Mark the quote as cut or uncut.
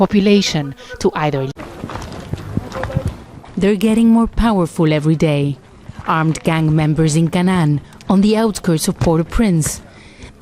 cut